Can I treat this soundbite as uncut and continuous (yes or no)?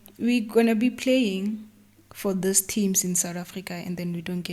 yes